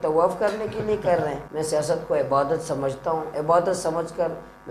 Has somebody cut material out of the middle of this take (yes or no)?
yes